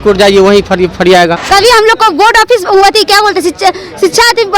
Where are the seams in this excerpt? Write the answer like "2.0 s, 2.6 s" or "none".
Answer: 1.4 s